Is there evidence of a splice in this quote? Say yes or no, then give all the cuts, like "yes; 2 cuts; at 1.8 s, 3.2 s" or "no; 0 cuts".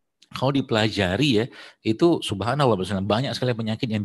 no; 0 cuts